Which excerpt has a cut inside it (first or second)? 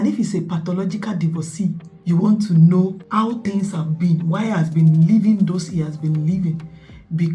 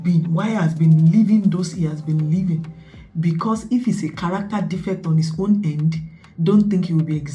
first